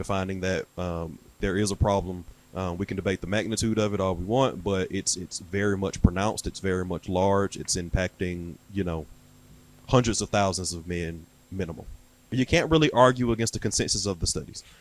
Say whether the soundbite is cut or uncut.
cut